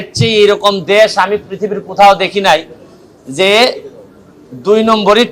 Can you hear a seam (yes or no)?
no